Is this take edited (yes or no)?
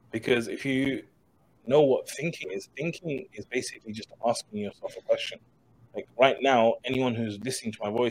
yes